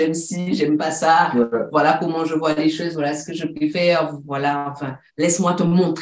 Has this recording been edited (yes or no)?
no